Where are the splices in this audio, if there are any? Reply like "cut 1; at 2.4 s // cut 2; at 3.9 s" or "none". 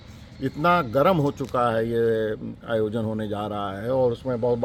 none